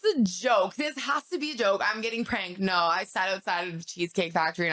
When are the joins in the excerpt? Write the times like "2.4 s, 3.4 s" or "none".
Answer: none

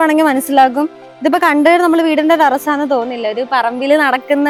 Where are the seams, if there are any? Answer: none

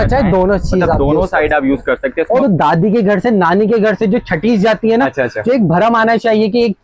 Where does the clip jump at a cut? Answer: 2.4 s

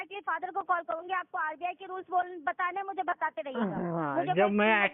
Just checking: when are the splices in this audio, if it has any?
none

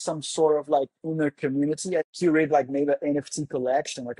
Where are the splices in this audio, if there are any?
2.1 s

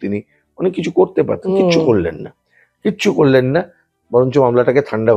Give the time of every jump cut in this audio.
none

